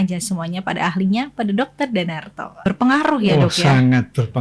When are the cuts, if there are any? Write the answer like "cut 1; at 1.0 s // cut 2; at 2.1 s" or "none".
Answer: cut 1; at 2.6 s

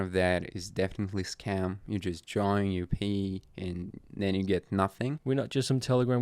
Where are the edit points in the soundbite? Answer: cut 1; at 5.2 s

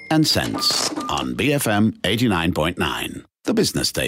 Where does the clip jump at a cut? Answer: none

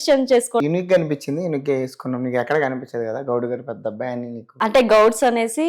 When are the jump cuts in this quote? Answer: none

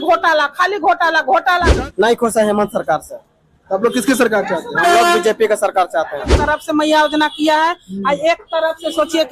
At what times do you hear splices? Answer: cut 1; at 1.7 s // cut 2; at 6.3 s

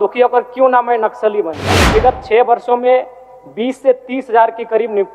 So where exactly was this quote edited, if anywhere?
cut 1; at 1.9 s

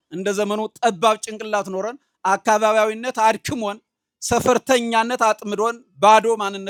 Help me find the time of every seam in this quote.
none

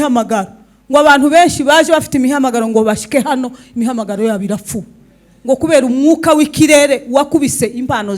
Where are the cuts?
none

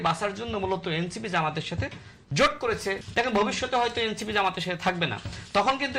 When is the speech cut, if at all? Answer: cut 1; at 3.0 s

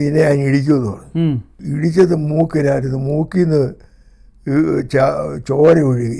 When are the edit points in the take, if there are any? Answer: cut 1; at 1.6 s

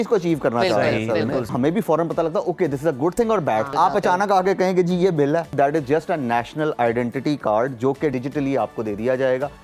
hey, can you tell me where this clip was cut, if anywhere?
cut 1; at 1.5 s // cut 2; at 3.7 s // cut 3; at 5.5 s // cut 4; at 8.1 s

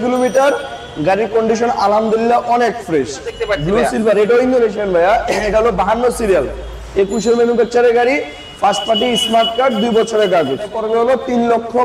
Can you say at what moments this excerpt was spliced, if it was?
cut 1; at 3.4 s // cut 2; at 10.8 s

